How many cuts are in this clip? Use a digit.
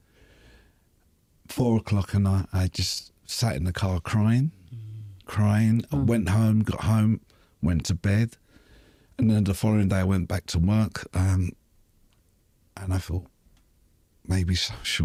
0